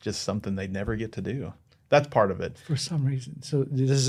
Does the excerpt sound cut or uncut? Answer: uncut